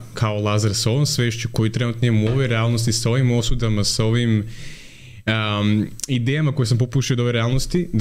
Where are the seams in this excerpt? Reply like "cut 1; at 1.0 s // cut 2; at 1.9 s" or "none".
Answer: none